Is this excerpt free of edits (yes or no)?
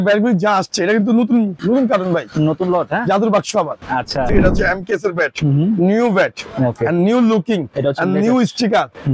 no